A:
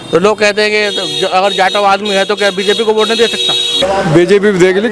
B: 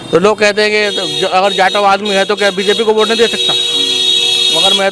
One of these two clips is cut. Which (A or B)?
A